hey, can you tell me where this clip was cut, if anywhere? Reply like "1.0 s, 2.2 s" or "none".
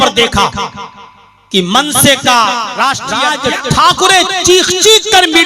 3.3 s